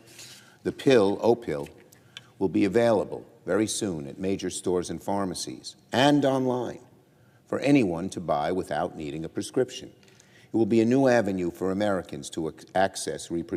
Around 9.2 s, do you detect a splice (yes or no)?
no